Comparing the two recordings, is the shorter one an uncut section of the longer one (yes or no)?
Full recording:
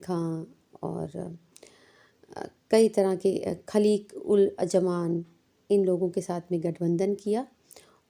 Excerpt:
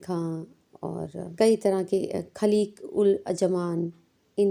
no